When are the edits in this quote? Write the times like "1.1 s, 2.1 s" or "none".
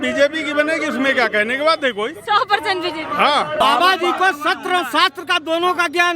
3.6 s